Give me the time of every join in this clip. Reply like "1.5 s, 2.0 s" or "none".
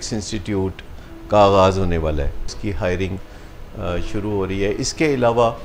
2.6 s

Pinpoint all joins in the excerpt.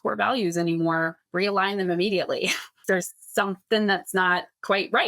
1.2 s, 3.1 s

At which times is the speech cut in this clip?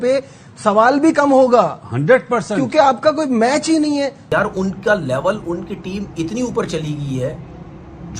4.2 s

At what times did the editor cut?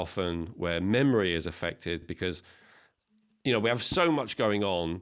none

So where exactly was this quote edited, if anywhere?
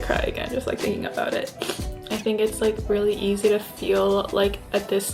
1.8 s

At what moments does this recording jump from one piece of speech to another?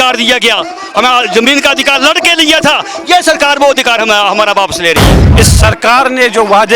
5.2 s

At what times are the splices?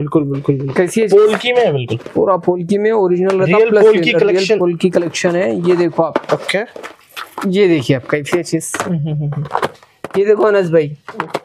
none

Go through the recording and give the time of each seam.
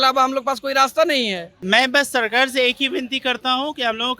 1.5 s

